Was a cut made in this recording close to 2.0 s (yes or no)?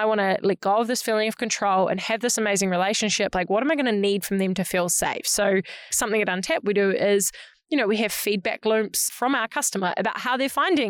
no